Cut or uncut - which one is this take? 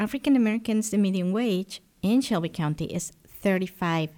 uncut